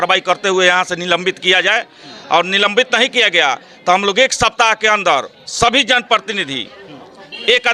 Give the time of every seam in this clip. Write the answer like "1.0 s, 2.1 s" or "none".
none